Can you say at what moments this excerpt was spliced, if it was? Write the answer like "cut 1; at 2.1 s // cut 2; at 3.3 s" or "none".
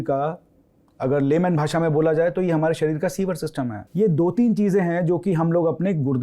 cut 1; at 3.8 s